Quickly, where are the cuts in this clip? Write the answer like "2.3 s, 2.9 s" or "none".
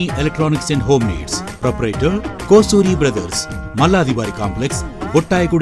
none